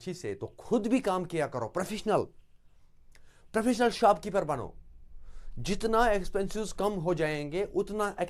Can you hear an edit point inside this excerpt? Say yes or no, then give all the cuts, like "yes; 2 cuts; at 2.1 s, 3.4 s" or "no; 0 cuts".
no; 0 cuts